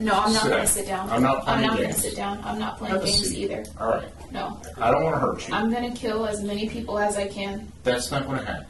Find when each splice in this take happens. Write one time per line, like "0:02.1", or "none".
none